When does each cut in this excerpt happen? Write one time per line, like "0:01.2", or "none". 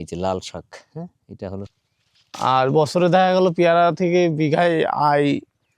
0:01.7